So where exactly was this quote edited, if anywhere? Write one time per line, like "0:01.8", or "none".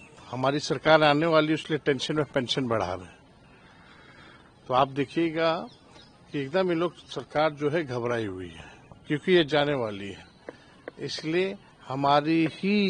none